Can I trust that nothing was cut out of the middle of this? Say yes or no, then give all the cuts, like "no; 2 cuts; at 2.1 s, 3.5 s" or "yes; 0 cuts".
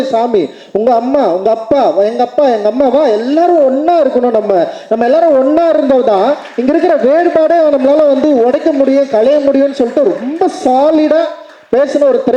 yes; 0 cuts